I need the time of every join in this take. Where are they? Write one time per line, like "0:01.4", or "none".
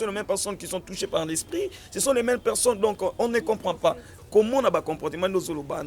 0:04.1